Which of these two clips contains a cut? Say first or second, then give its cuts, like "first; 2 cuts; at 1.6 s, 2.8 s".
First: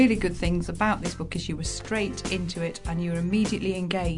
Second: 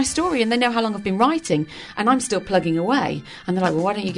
second; 1 cut; at 1.8 s